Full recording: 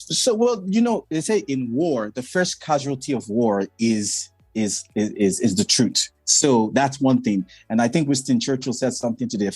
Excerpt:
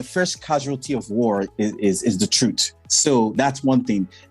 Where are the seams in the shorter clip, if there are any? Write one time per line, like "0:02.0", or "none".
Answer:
0:01.5